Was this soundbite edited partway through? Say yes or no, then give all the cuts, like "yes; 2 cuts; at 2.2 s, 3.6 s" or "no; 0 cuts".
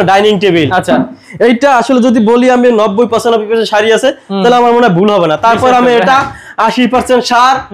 no; 0 cuts